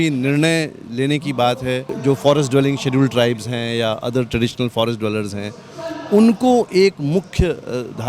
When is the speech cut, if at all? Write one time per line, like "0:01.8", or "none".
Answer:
0:01.9